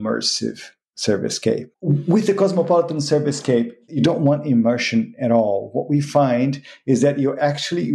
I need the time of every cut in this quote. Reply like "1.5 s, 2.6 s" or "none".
1.7 s, 3.8 s